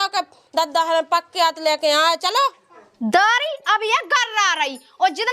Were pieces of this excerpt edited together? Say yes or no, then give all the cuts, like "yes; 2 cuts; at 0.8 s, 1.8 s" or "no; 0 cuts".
yes; 1 cut; at 2.9 s